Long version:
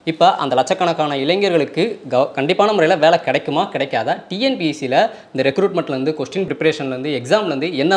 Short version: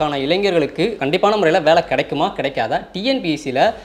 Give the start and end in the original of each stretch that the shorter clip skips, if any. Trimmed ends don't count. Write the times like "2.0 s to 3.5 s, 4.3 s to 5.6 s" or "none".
2.0 s to 2.4 s